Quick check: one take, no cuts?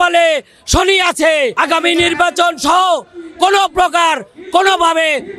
no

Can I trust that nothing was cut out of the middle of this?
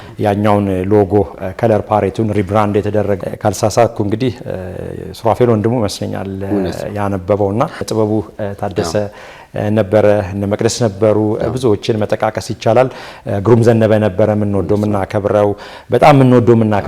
no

